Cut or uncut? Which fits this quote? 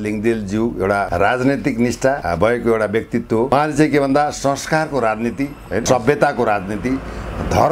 cut